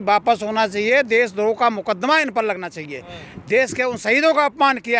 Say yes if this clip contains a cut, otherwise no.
no